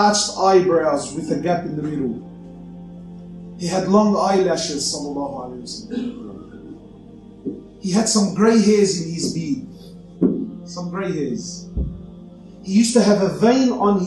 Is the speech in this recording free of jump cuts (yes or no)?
no